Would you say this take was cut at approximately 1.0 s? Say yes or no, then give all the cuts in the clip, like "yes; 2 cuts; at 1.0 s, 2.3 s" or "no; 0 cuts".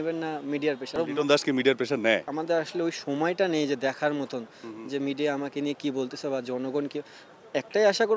yes; 2 cuts; at 1.0 s, 2.3 s